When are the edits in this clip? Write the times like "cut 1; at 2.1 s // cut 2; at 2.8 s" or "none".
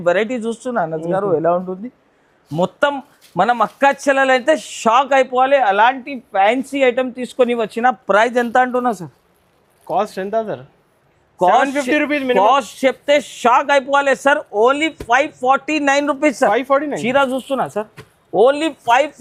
none